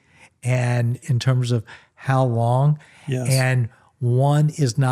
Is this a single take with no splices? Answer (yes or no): no